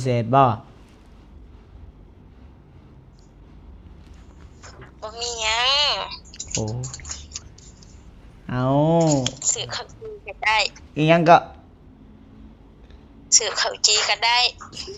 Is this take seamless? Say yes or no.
yes